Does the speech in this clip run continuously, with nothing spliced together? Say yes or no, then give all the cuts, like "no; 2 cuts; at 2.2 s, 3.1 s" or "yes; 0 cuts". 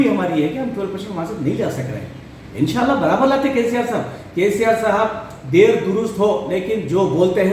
yes; 0 cuts